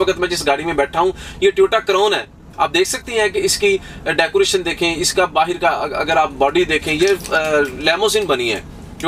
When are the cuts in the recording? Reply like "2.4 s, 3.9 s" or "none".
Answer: none